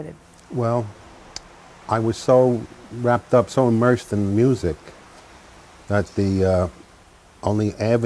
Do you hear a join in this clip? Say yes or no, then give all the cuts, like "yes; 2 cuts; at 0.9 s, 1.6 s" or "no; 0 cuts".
yes; 1 cut; at 5.6 s